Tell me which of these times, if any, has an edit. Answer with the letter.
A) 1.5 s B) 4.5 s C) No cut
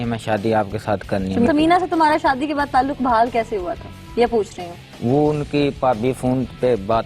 A